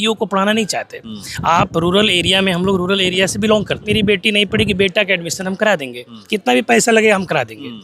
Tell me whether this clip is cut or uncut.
cut